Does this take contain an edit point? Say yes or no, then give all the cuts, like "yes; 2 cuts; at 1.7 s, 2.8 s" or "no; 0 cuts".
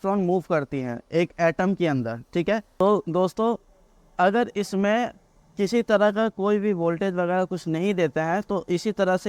yes; 1 cut; at 2.8 s